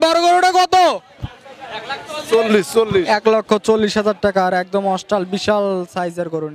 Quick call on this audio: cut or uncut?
uncut